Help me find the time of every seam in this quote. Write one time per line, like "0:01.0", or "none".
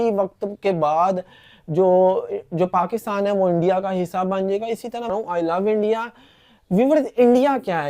0:05.1